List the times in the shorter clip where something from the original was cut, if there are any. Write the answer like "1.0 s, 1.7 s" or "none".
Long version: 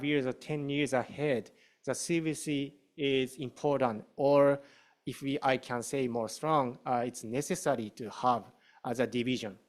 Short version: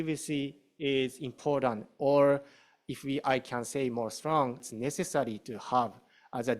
4.6 s